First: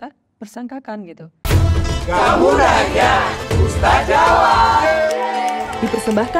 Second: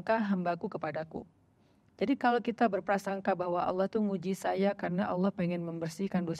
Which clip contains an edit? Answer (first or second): first